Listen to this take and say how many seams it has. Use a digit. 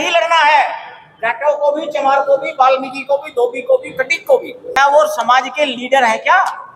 1